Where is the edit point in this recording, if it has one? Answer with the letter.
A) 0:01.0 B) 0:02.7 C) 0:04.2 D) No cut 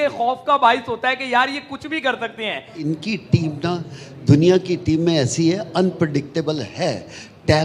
B